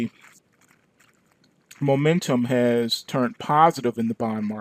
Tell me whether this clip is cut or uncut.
uncut